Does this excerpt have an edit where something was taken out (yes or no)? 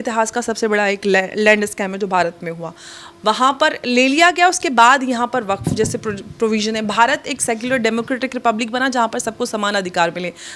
no